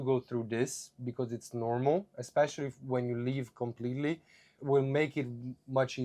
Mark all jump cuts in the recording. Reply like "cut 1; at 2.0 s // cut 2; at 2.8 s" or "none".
cut 1; at 4.5 s